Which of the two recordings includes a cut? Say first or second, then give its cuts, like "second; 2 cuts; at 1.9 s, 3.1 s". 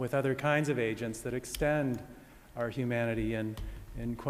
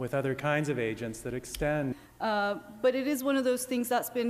first; 1 cut; at 2.1 s